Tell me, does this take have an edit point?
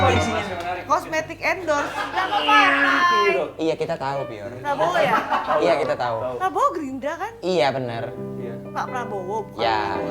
yes; 1 cut; at 2.1 s

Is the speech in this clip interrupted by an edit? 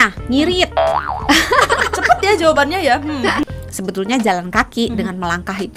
yes; 1 cut; at 3.5 s

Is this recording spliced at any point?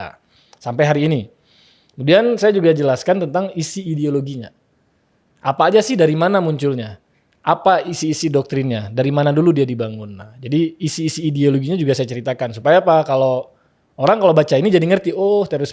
no; 0 cuts

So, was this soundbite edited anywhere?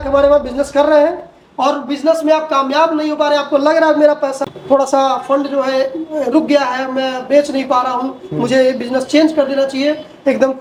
no; 0 cuts

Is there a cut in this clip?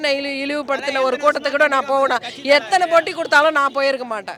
no; 0 cuts

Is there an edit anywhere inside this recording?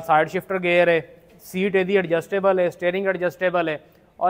no; 0 cuts

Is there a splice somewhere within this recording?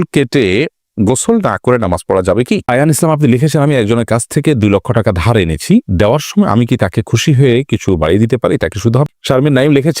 yes; 2 cuts; at 2.6 s, 9.1 s

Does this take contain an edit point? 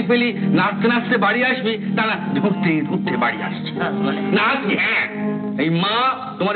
no; 0 cuts

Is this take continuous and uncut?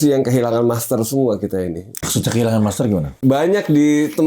no; 2 cuts; at 1.9 s, 3.1 s

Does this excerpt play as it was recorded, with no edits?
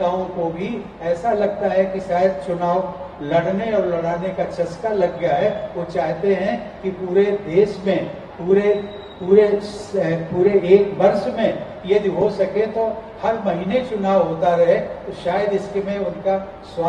yes; 0 cuts

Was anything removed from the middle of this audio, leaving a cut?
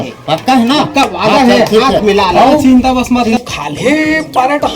yes; 1 cut; at 3.4 s

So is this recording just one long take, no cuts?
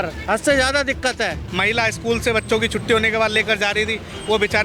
no; 1 cut; at 1.4 s

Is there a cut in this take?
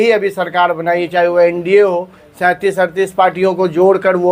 no; 0 cuts

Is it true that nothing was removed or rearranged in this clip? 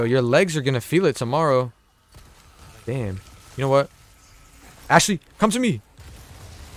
yes; 0 cuts

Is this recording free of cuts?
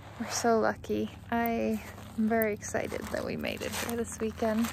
no; 2 cuts; at 1.2 s, 2.0 s

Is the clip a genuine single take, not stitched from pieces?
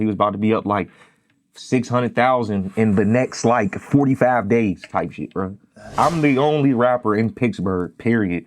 no; 1 cut; at 5.9 s

